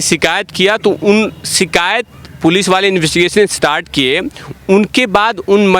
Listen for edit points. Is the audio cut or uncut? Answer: uncut